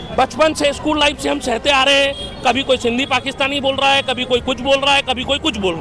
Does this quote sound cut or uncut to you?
uncut